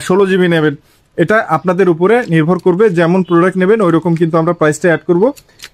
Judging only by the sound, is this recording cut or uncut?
uncut